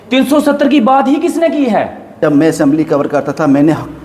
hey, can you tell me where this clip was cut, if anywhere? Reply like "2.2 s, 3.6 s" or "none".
2.2 s